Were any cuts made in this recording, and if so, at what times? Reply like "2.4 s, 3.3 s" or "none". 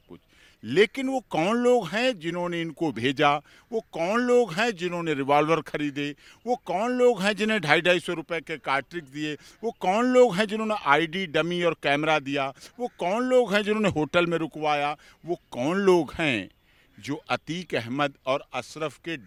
none